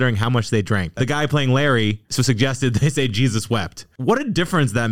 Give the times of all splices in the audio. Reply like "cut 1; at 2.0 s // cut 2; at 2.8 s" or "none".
cut 1; at 1.0 s // cut 2; at 2.0 s